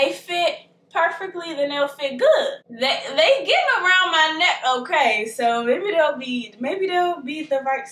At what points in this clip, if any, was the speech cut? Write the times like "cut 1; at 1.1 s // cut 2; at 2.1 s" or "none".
none